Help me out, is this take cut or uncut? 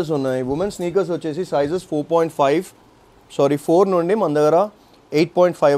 uncut